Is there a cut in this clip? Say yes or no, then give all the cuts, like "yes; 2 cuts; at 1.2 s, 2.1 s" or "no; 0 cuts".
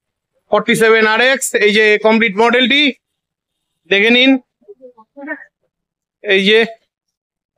no; 0 cuts